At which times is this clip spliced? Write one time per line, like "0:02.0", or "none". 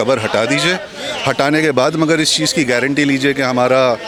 none